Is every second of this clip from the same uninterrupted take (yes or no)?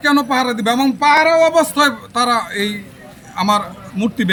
yes